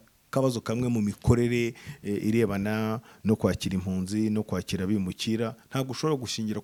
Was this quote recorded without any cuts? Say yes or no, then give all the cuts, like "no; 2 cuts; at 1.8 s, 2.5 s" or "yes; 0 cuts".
yes; 0 cuts